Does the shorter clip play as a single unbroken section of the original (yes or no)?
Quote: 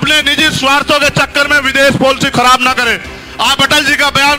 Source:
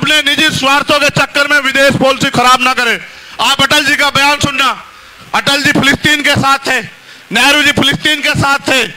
yes